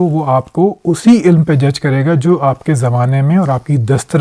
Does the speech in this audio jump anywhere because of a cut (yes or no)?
no